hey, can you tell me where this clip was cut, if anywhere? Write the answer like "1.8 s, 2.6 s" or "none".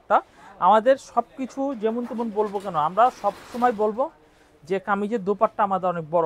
none

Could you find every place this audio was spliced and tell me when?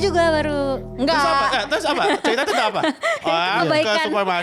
none

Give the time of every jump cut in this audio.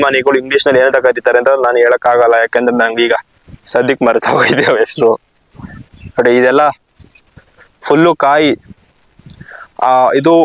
none

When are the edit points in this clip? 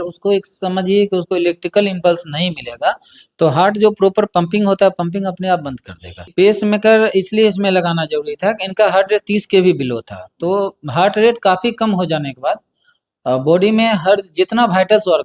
6.3 s

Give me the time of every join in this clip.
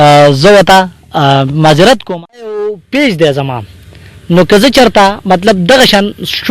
2.6 s

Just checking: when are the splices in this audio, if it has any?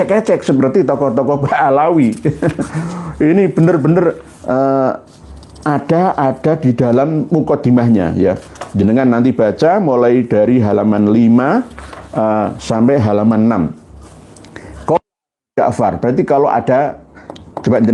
none

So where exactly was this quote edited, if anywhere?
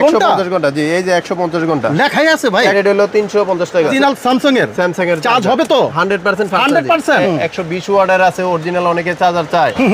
2.7 s, 3.9 s, 7.2 s

